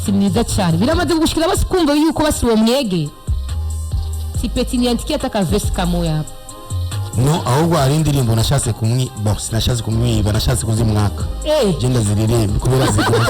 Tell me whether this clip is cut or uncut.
uncut